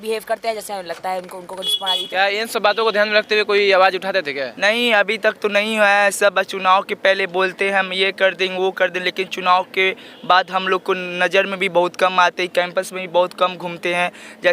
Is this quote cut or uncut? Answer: cut